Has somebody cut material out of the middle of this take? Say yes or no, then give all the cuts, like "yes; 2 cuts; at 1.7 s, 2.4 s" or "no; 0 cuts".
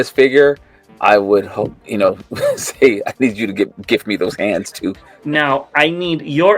yes; 1 cut; at 5.1 s